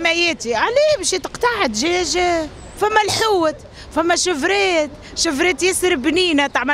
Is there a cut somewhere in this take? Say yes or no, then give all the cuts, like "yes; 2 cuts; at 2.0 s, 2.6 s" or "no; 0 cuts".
yes; 1 cut; at 2.6 s